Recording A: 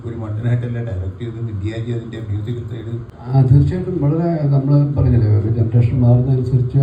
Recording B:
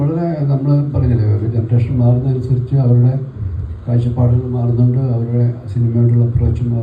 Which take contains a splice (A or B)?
A